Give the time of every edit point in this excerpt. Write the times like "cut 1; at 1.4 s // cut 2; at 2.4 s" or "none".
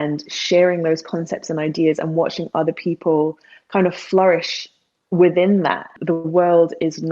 cut 1; at 5.9 s